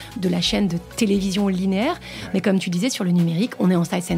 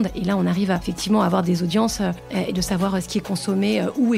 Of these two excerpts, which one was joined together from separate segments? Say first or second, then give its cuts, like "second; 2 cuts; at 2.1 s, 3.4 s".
second; 2 cuts; at 0.9 s, 2.2 s